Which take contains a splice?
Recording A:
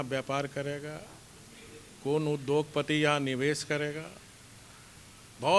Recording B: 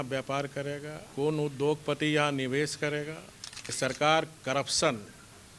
B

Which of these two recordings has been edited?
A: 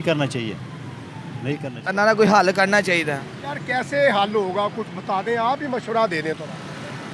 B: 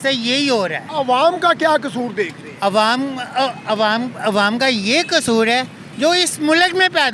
A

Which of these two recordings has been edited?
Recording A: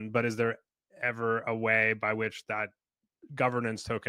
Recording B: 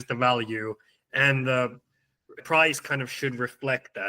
B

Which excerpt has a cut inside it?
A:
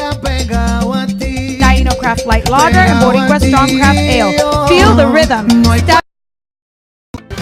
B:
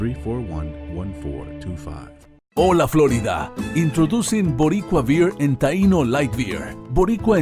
B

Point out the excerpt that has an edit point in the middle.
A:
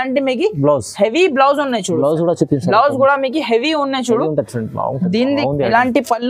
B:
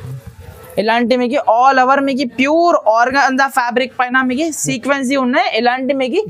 A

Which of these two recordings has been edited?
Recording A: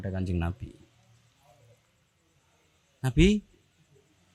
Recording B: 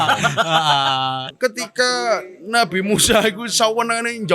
B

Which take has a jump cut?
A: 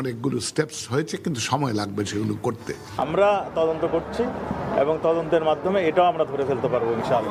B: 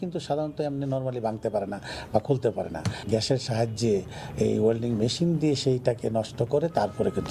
A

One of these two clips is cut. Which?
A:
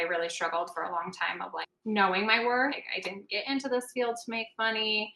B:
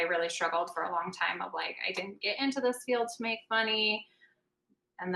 A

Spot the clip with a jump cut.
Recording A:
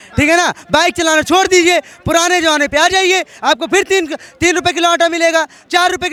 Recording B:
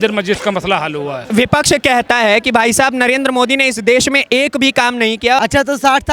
B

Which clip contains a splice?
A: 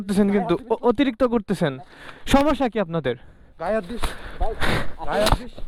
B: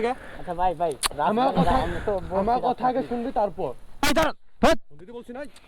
B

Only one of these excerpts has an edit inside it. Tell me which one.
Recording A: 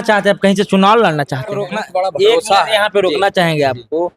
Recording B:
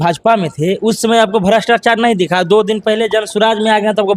A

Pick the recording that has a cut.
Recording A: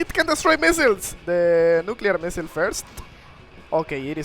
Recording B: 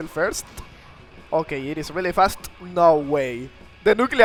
A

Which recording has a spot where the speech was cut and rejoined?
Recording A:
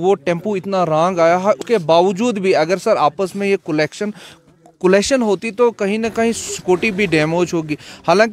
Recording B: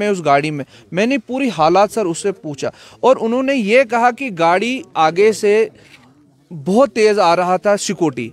A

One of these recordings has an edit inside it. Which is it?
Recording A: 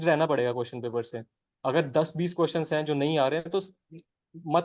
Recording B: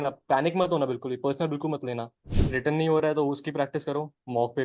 B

